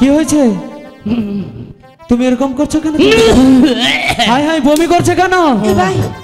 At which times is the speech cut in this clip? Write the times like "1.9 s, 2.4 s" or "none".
none